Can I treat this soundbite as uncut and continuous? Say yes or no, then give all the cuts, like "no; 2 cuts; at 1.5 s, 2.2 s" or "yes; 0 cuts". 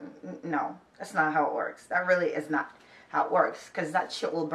yes; 0 cuts